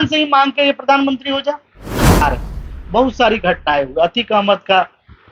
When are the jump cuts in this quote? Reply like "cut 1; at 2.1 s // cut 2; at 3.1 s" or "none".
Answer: cut 1; at 2.2 s